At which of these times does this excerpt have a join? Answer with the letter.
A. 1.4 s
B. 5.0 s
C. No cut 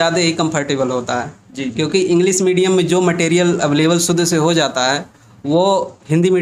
C